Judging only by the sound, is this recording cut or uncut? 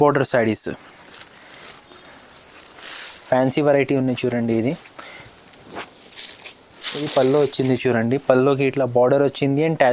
uncut